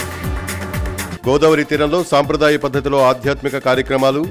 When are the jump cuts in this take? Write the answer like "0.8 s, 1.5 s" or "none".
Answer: 1.0 s